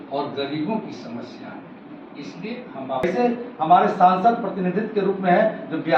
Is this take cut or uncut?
cut